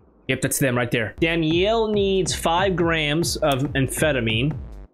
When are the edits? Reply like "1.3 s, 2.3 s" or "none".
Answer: 1.1 s